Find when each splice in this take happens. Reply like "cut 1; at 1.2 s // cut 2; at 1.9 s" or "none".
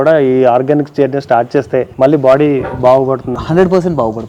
cut 1; at 1.9 s